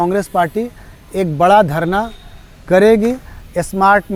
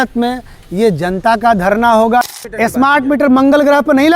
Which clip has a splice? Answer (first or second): second